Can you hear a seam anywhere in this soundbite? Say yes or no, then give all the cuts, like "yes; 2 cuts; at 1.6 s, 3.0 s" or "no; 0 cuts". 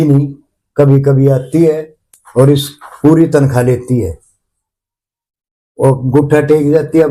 no; 0 cuts